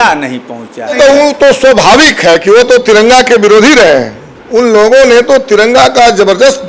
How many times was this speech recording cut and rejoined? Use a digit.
2